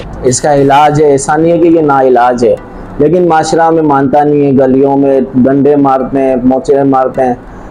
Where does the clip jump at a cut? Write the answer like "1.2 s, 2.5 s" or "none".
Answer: none